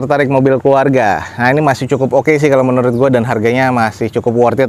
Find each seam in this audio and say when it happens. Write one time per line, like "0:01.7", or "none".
none